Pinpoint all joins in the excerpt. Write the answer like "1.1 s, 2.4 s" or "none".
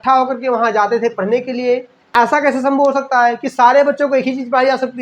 2.0 s